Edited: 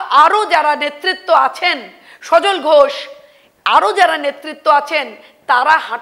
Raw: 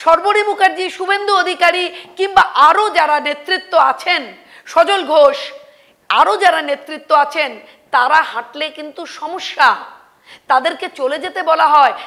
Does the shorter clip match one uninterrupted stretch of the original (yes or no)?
yes